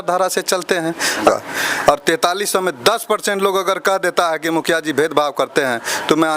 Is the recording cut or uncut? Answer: cut